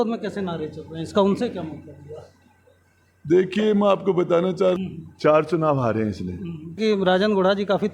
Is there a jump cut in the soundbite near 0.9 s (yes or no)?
no